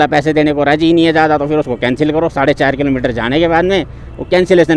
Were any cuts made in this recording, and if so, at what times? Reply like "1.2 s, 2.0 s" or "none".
none